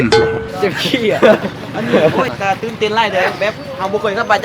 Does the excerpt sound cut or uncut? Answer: cut